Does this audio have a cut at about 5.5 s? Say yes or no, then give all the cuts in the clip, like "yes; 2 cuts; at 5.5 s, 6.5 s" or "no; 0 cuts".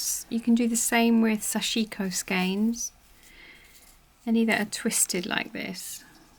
no; 0 cuts